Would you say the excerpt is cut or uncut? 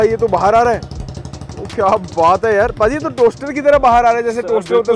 uncut